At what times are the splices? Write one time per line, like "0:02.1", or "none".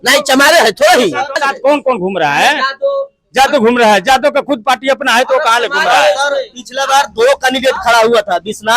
0:01.3